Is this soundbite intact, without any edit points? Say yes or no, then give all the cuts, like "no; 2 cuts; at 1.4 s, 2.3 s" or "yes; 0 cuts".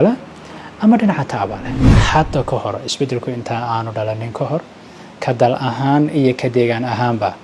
no; 1 cut; at 2.0 s